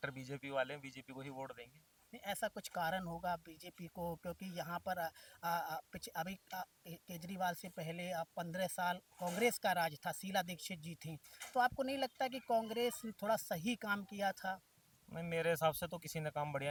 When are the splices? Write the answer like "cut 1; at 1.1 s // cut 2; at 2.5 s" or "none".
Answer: none